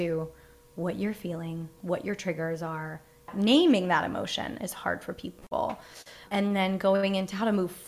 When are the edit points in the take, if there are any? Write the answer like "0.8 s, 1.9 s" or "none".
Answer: 3.3 s, 6.2 s